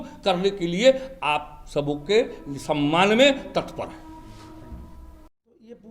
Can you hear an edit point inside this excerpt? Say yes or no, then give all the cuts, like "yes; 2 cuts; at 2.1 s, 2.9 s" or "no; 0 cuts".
no; 0 cuts